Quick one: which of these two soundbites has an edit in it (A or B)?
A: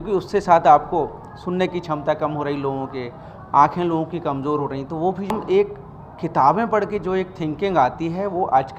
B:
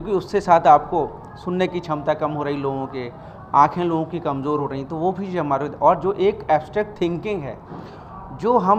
A